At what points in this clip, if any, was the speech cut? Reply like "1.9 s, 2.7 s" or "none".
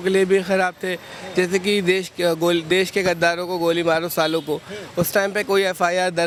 none